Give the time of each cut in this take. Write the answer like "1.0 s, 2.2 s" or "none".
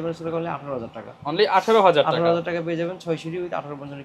none